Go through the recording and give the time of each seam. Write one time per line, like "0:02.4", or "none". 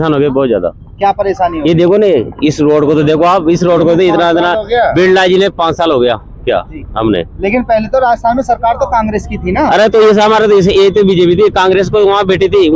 none